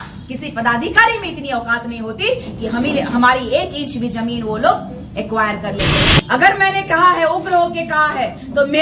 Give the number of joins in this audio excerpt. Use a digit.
1